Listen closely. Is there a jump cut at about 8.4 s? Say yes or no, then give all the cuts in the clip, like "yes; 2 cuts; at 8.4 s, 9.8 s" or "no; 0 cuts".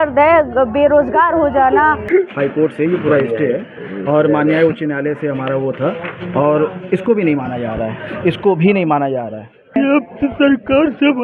no; 2 cuts; at 2.0 s, 9.8 s